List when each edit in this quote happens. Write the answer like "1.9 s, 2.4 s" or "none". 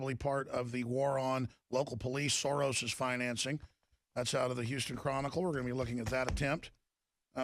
5.3 s

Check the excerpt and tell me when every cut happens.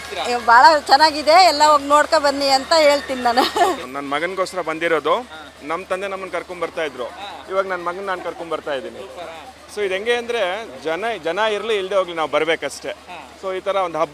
none

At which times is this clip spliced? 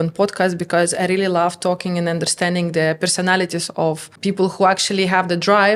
none

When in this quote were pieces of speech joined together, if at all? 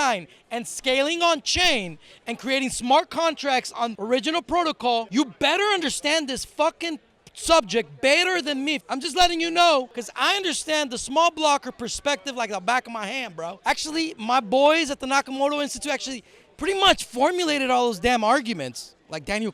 3.8 s, 5.1 s, 8.8 s, 10.0 s, 13.5 s

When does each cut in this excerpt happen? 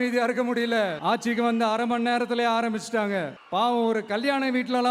1.0 s

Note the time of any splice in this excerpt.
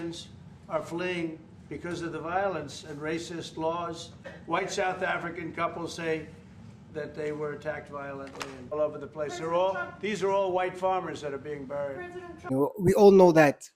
4.3 s, 8.7 s, 12.5 s

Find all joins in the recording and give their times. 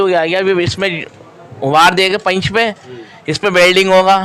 none

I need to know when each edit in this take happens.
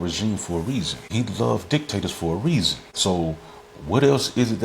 1.0 s, 2.8 s

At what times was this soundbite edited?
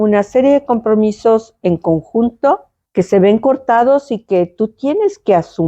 2.8 s

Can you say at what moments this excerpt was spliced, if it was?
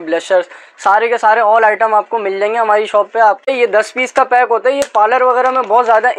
3.5 s

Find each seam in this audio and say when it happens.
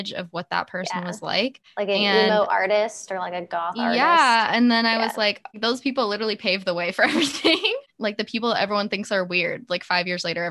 1.6 s, 5.6 s, 7.9 s

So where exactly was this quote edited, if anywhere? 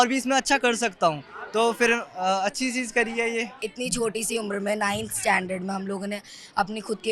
3.6 s

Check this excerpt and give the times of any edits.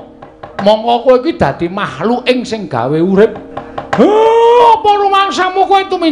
1.9 s

